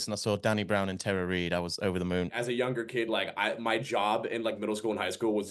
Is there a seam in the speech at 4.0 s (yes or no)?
no